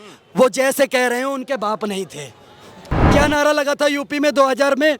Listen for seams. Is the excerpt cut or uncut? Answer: cut